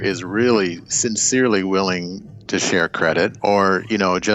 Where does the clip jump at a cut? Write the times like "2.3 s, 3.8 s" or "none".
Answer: 3.4 s